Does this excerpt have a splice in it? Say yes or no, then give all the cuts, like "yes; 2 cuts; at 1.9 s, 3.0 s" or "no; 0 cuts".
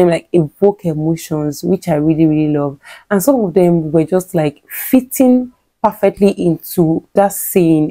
no; 0 cuts